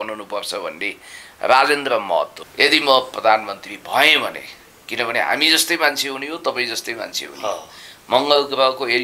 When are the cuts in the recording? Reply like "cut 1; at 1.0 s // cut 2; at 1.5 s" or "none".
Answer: cut 1; at 2.4 s